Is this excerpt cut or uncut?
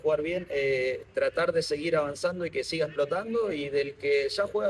uncut